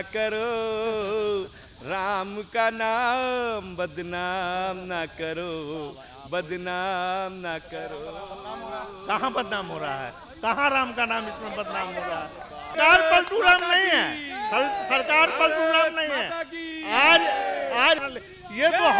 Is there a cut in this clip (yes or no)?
yes